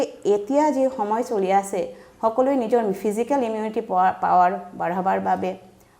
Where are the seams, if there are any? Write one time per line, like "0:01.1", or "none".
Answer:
none